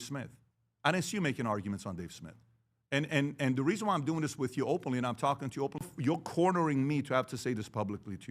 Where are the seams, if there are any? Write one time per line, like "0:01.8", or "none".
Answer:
0:05.8